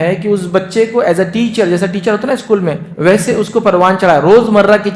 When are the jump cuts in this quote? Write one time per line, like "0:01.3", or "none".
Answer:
none